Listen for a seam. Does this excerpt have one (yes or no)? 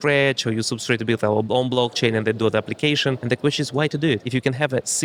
yes